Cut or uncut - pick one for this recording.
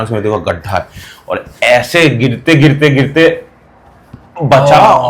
uncut